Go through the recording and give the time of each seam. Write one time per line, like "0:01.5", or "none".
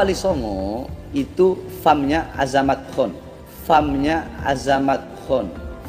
none